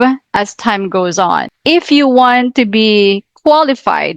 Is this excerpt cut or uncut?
cut